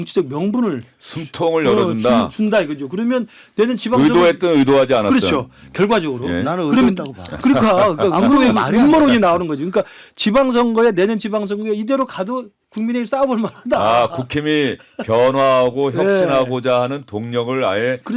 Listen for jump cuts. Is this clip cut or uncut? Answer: uncut